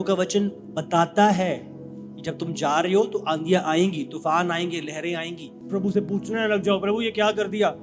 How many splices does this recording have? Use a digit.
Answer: 1